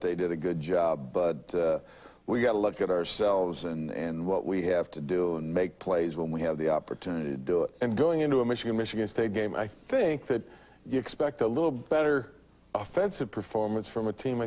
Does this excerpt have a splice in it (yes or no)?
no